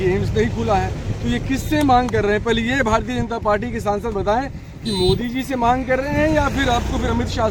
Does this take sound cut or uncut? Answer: uncut